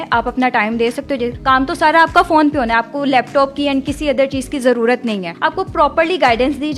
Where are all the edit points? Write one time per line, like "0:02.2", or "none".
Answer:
0:01.3
0:05.3